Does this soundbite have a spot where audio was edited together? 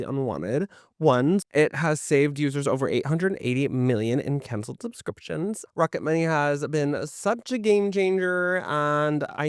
yes; 2 cuts; at 1.4 s, 5.7 s

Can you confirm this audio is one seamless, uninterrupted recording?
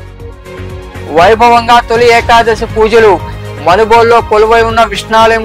no; 1 cut; at 1.0 s

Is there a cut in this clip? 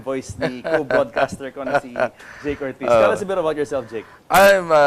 no; 0 cuts

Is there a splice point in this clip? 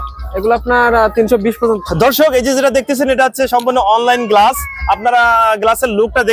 yes; 1 cut; at 1.9 s

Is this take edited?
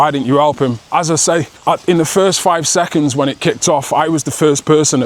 yes; 1 cut; at 1.5 s

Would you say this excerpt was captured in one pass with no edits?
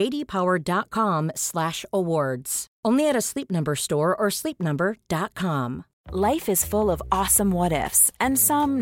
no; 1 cut; at 5.9 s

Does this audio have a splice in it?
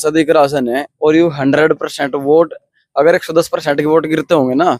no; 0 cuts

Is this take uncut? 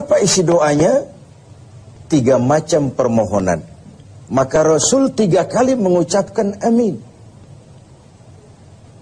yes; 0 cuts

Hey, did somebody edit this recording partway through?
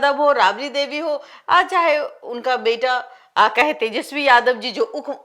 no; 0 cuts

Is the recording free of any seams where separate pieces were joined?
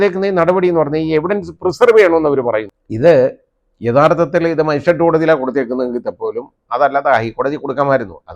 no; 1 cut; at 2.8 s

